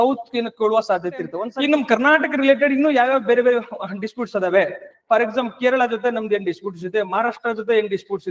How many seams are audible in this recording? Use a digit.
1